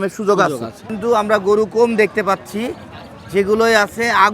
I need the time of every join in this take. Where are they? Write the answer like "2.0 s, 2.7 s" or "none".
0.9 s